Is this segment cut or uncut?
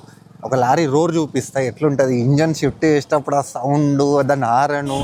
uncut